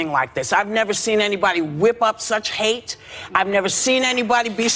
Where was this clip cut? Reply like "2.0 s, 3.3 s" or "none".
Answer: none